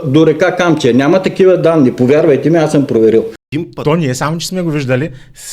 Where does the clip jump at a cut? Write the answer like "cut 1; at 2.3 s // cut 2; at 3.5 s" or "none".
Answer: cut 1; at 3.5 s